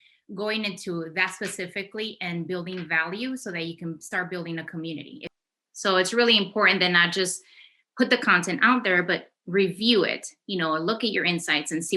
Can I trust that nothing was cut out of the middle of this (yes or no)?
no